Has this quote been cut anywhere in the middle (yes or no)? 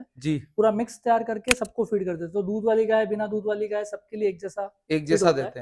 no